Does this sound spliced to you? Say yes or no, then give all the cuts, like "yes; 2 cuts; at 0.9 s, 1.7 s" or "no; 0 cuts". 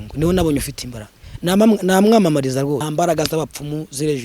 yes; 1 cut; at 2.8 s